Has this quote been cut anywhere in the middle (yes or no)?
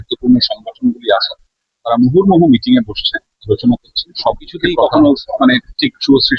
yes